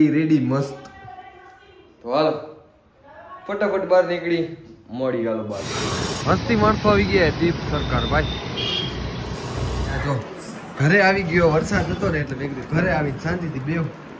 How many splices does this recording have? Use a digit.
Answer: 2